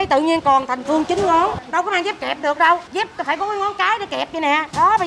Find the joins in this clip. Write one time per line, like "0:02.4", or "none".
0:01.6
0:02.9